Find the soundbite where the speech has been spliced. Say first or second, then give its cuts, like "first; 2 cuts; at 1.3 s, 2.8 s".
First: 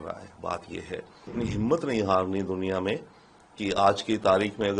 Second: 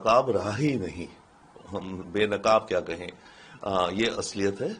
first; 1 cut; at 1.3 s